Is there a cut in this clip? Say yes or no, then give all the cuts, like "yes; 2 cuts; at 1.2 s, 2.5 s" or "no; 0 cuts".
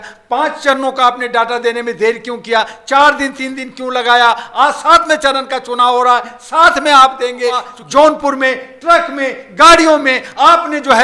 yes; 1 cut; at 7.8 s